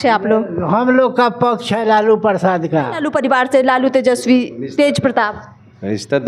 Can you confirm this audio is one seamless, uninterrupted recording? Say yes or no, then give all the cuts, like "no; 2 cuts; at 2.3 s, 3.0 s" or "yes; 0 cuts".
no; 1 cut; at 3.0 s